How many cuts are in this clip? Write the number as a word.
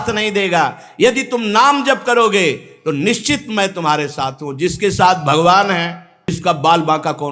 one